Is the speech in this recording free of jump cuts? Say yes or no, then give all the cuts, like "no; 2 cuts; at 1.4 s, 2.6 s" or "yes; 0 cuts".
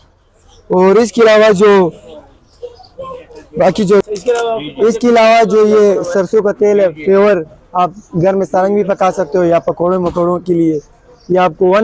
no; 1 cut; at 4.1 s